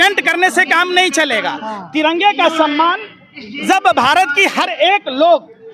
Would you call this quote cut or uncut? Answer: uncut